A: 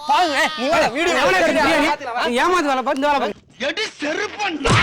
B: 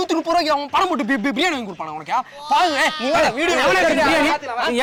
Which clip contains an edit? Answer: A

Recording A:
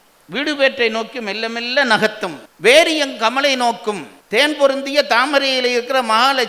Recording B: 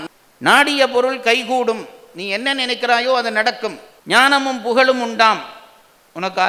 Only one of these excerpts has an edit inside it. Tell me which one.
A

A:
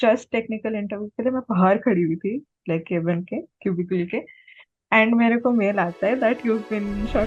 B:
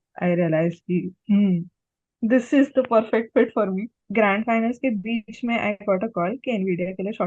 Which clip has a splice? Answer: B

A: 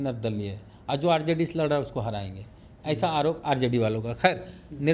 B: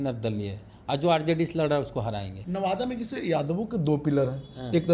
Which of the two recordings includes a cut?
B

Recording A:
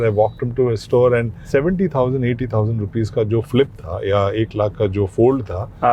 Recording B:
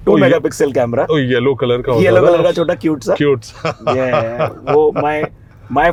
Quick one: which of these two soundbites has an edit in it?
A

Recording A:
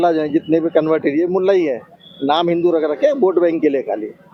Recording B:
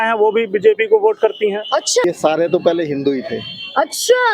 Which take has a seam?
B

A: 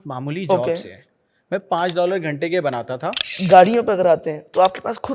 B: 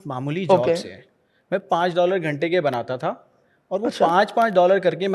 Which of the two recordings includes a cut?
A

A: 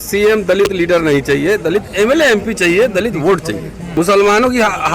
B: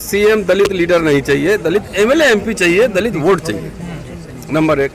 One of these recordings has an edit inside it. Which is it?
A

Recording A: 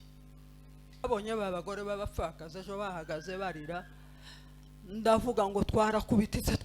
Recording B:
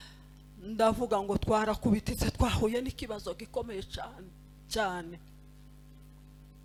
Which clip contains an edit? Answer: A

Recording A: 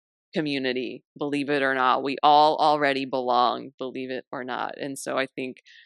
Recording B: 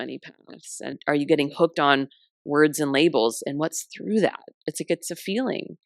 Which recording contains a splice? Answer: B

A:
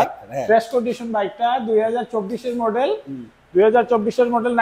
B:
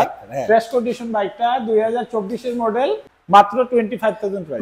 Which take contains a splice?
B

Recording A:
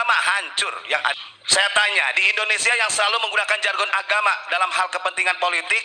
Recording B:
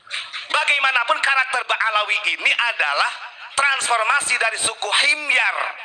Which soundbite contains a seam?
A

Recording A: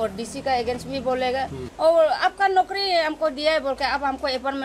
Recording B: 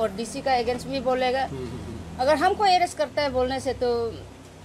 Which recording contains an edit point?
A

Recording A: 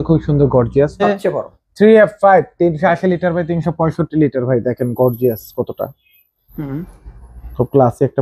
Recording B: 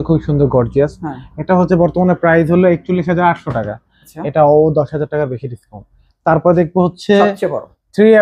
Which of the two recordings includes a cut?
A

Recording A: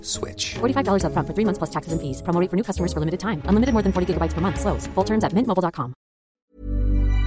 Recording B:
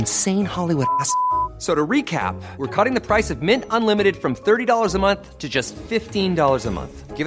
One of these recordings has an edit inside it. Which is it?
A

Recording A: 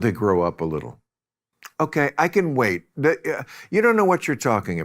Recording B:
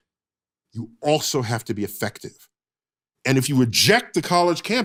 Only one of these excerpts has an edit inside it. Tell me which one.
A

